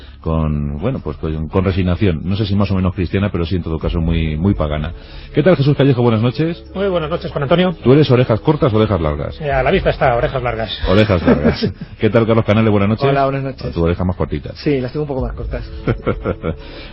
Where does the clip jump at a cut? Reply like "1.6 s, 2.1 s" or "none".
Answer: 14.6 s